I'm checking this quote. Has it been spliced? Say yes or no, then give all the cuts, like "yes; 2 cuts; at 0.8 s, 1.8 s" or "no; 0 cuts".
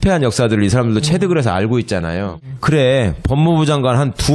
yes; 1 cut; at 3.3 s